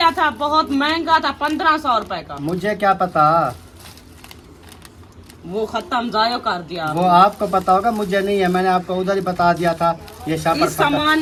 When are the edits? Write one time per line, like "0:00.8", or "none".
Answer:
none

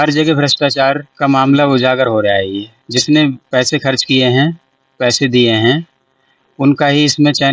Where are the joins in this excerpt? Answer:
0:01.1
0:02.7

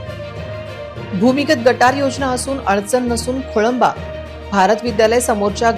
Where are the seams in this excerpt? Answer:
0:01.1

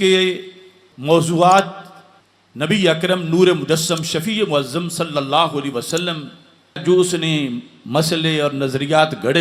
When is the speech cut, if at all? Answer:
0:06.8

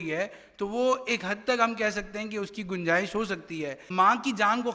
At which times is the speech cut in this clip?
0:03.8

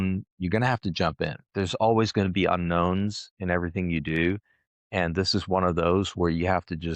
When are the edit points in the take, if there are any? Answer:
0:01.4

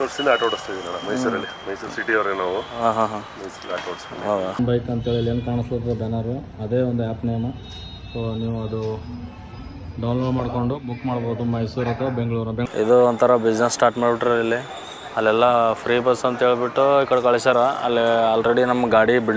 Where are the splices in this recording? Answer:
0:04.6
0:12.6

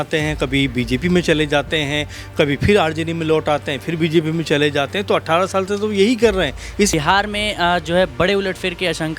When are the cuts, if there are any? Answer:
0:06.9

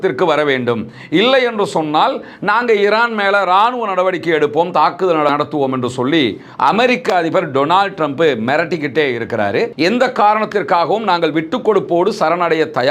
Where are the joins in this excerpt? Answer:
0:05.3
0:09.7

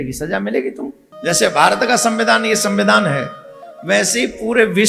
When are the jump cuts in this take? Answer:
0:01.1

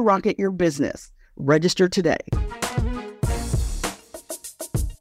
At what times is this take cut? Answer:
0:02.3
0:04.0

